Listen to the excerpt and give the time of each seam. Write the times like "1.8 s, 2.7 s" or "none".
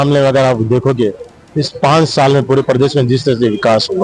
none

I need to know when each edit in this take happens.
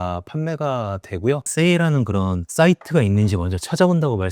1.5 s

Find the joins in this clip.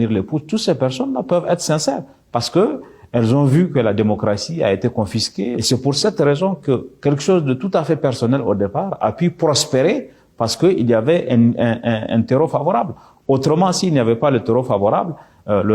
5.6 s

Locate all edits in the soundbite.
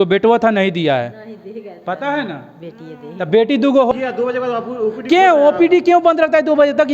3.9 s

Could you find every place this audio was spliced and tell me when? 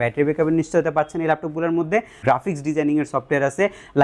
2.2 s

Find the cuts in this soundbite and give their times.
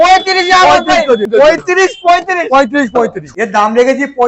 1.3 s, 3.2 s

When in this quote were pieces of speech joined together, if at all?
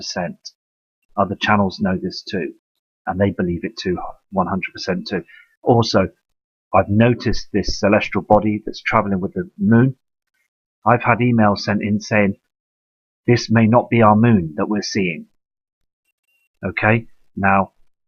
7.2 s

